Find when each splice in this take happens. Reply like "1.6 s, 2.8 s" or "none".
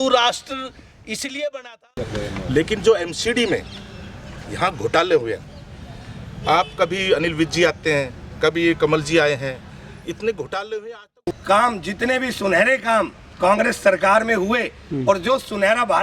1.9 s, 11.2 s